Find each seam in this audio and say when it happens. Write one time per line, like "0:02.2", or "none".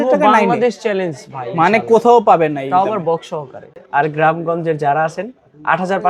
0:03.7